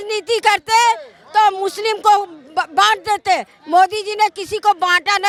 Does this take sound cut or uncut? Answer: uncut